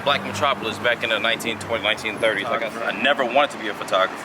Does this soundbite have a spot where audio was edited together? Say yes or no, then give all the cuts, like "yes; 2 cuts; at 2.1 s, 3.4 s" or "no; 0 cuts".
yes; 1 cut; at 2.7 s